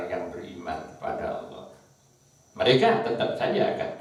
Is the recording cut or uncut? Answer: uncut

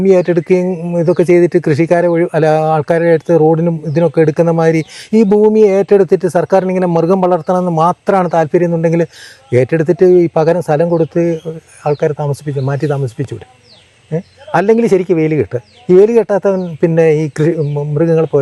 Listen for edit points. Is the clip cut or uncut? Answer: uncut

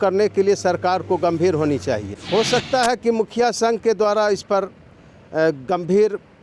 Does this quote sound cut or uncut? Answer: cut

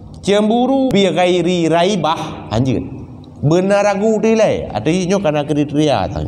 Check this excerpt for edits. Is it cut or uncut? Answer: cut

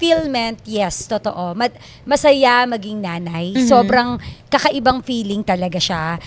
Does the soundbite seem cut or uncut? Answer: uncut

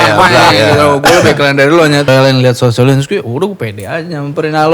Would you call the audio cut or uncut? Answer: cut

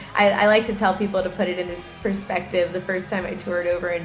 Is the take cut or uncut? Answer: uncut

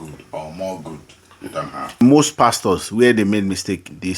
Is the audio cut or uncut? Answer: cut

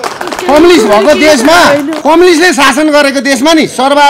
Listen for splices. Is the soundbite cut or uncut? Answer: cut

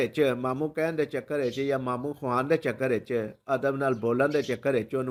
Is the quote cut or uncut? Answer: uncut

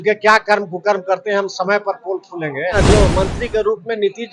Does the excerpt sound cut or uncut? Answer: cut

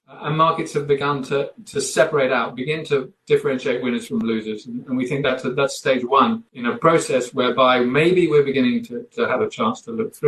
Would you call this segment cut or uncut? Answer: cut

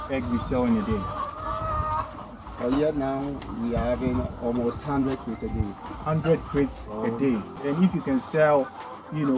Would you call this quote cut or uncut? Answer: cut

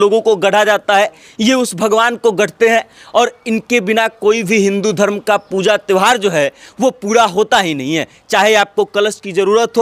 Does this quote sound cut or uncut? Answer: uncut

